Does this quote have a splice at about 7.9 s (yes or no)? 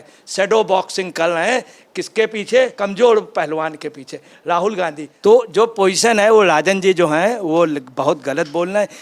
no